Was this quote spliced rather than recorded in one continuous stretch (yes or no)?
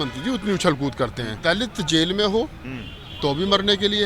yes